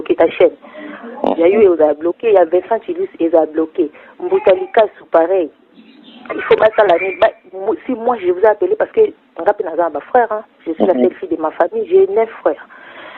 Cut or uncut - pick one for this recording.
uncut